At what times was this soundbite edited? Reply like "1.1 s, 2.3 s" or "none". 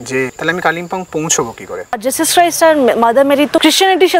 1.9 s